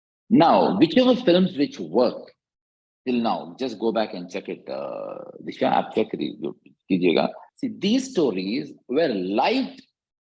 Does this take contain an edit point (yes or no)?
yes